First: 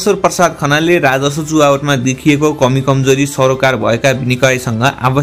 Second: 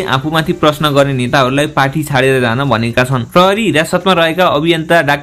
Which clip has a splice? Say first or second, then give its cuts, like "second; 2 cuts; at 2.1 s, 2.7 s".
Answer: second; 1 cut; at 3.2 s